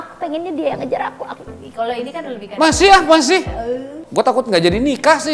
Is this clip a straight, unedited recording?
no; 1 cut; at 3.9 s

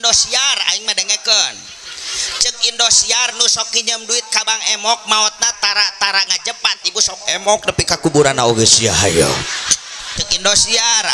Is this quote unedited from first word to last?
no; 1 cut; at 10.2 s

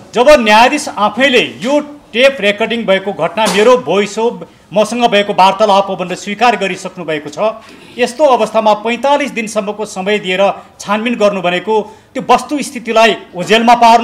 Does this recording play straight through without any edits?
yes; 0 cuts

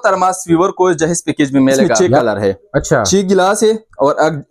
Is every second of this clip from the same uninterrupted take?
no; 1 cut; at 2.0 s

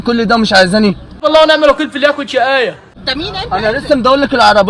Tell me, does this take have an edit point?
no; 0 cuts

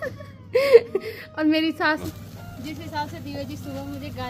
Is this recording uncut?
no; 1 cut; at 2.1 s

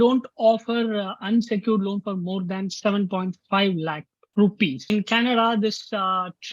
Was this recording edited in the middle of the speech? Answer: yes; 1 cut; at 4.9 s

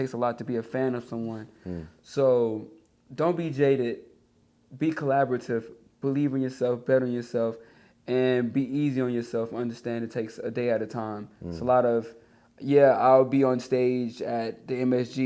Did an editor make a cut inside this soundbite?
no; 0 cuts

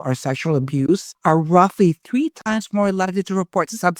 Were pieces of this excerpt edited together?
yes; 1 cut; at 1.1 s

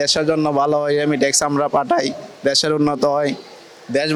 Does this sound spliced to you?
no; 0 cuts

